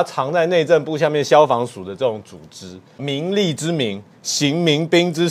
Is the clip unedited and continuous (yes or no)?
no